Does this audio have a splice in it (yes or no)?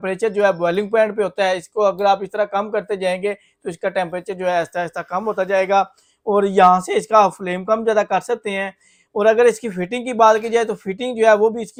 no